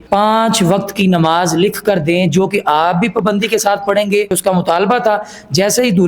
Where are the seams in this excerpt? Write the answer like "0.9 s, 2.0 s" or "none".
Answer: 4.4 s